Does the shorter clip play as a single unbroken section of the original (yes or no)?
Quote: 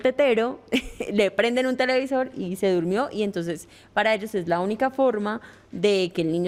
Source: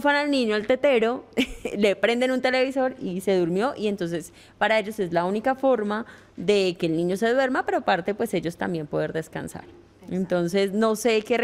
yes